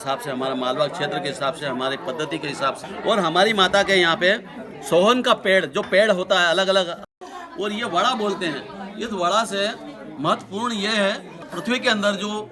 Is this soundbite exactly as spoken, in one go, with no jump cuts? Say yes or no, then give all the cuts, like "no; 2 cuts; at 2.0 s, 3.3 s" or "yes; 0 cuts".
no; 3 cuts; at 2.9 s, 7.1 s, 11.4 s